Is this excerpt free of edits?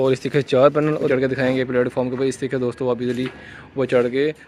no; 1 cut; at 1.1 s

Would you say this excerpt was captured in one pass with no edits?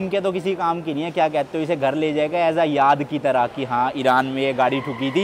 yes; 0 cuts

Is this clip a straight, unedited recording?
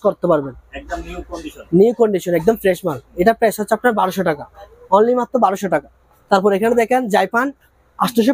yes; 0 cuts

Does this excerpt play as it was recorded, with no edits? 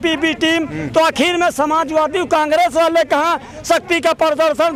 yes; 0 cuts

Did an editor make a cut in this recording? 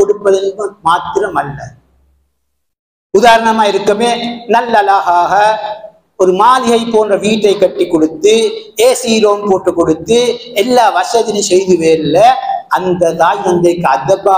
no; 0 cuts

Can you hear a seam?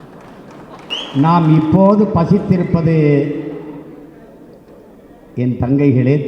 yes; 1 cut; at 0.9 s

